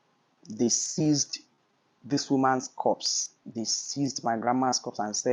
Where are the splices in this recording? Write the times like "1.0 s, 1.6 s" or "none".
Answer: none